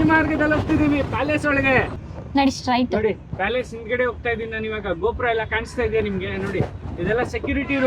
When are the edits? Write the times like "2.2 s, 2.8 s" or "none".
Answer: 2.0 s

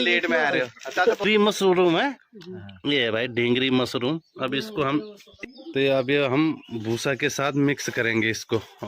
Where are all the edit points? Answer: 1.2 s

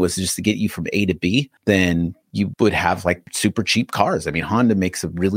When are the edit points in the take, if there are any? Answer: none

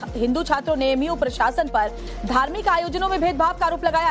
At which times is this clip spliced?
2.9 s

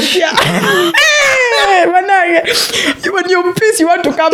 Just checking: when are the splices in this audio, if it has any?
none

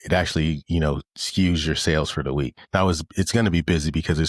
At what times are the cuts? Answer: 2.6 s

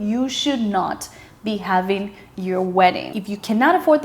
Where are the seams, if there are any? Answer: 3.0 s

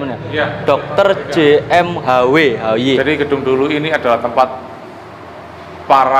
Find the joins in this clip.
3.0 s

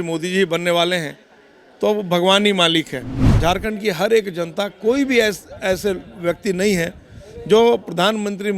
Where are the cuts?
3.2 s

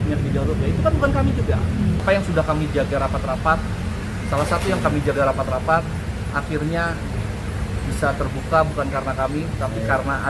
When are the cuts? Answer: 2.0 s

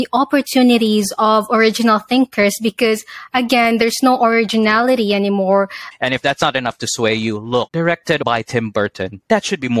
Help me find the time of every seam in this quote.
5.8 s, 8.2 s

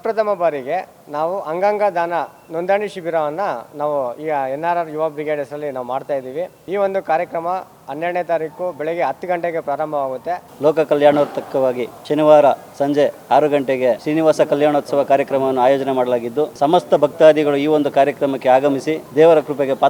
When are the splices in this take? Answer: 6.6 s, 10.5 s, 11.9 s, 14.0 s, 16.5 s, 19.0 s

